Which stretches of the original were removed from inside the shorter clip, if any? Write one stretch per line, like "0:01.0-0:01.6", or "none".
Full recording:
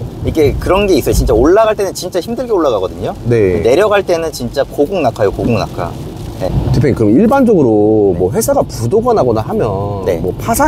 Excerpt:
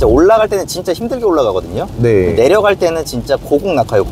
none